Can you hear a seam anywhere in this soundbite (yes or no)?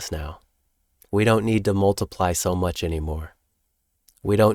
no